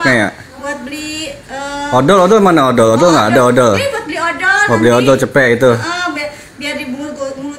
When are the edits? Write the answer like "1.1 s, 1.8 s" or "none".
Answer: none